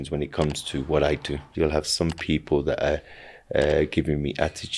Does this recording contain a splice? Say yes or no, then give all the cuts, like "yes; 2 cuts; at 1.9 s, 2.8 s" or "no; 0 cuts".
yes; 1 cut; at 1.4 s